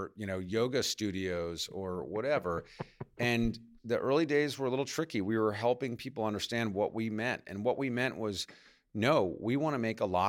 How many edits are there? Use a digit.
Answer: 1